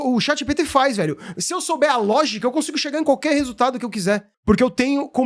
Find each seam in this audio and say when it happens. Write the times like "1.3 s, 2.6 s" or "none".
4.3 s